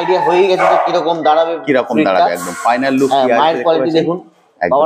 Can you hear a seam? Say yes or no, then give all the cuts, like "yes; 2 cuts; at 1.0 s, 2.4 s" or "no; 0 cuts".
no; 0 cuts